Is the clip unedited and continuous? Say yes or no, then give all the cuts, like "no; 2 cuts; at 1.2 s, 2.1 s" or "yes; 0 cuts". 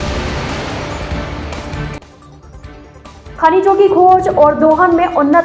no; 1 cut; at 3.1 s